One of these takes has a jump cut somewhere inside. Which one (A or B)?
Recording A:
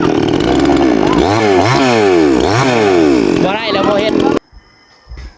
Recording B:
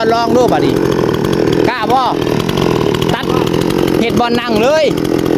A